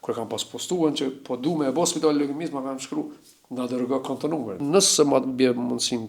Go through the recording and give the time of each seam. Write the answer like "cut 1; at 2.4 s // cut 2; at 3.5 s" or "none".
cut 1; at 4.6 s

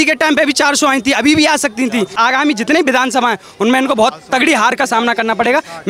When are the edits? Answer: cut 1; at 2.1 s

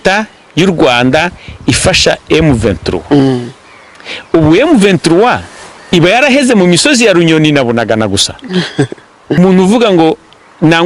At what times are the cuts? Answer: cut 1; at 9.4 s

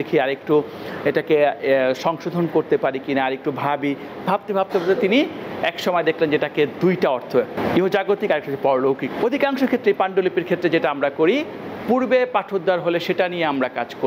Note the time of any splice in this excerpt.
cut 1; at 7.5 s // cut 2; at 9.1 s

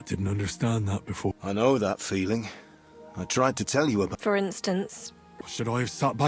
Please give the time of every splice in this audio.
cut 1; at 1.4 s // cut 2; at 4.1 s // cut 3; at 5.3 s

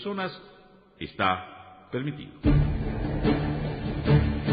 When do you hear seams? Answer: cut 1; at 2.4 s

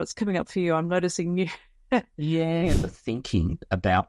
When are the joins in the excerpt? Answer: cut 1; at 2.7 s

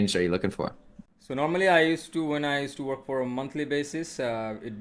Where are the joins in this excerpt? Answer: none

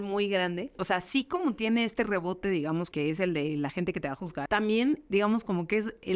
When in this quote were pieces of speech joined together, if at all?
cut 1; at 0.7 s // cut 2; at 2.9 s // cut 3; at 4.4 s // cut 4; at 5.0 s

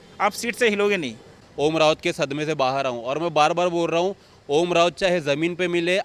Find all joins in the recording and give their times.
cut 1; at 1.4 s

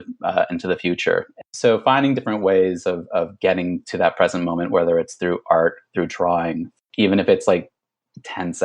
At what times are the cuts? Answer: cut 1; at 1.3 s // cut 2; at 6.7 s

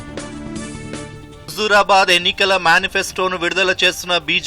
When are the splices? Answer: cut 1; at 1.3 s

